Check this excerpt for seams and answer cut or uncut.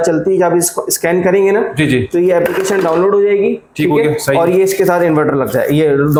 uncut